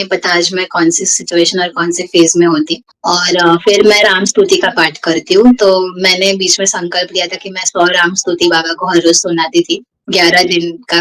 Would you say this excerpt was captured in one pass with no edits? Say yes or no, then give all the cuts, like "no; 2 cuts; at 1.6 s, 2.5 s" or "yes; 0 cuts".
no; 1 cut; at 2.8 s